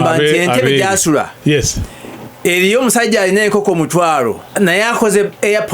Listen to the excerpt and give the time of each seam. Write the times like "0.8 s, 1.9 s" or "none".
4.4 s

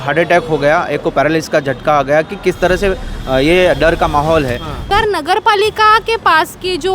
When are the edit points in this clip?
4.9 s

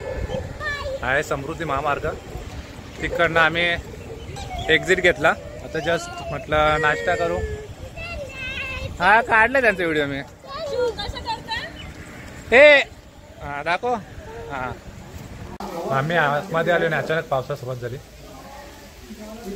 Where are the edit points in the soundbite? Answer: 15.6 s

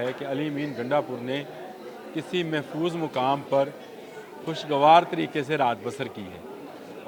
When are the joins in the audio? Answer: none

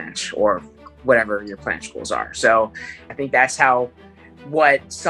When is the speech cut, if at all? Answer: 3.0 s

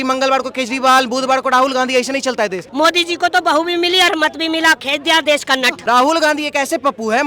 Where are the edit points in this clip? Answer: 2.6 s, 5.8 s

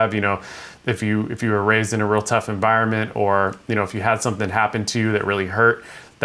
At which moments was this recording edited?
none

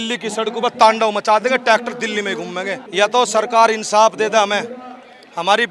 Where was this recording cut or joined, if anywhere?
2.8 s

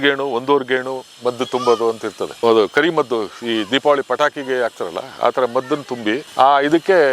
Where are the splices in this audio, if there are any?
none

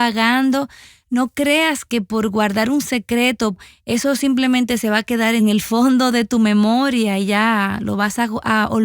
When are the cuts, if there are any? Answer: 3.6 s, 5.4 s

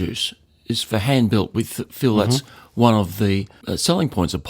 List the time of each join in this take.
3.6 s

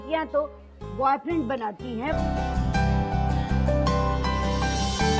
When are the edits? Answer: none

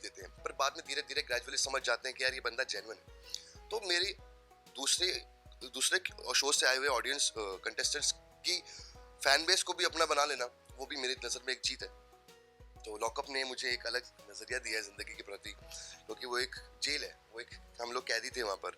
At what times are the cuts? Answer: none

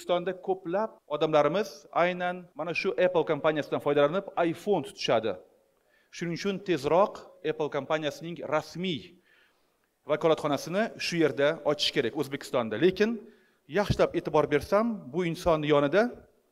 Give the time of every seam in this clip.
1.0 s, 2.5 s

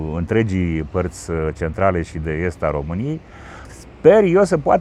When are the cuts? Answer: none

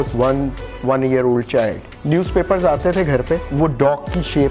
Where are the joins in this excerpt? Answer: 1.9 s, 3.5 s

